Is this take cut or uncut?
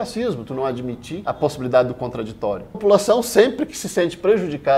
cut